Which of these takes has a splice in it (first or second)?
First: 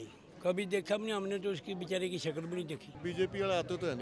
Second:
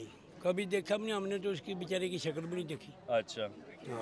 first